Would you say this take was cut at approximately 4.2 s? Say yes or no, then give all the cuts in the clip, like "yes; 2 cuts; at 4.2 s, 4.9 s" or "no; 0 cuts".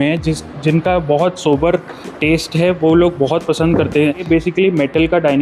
yes; 1 cut; at 4.2 s